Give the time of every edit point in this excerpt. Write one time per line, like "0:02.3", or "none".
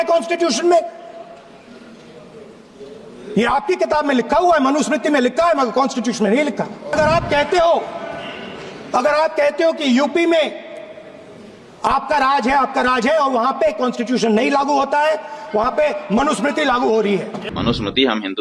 0:06.9
0:17.4